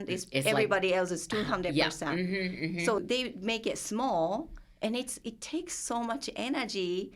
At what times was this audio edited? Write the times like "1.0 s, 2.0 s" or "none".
3.0 s